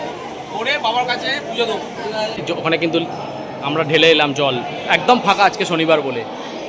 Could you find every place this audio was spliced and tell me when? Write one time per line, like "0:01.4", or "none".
0:02.4